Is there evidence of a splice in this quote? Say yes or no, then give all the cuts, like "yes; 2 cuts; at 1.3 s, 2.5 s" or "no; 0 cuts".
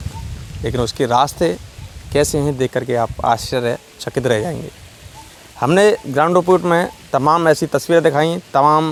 no; 0 cuts